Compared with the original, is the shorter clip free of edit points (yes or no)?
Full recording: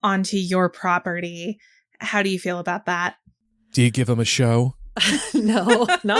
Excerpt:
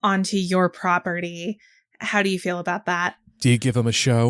no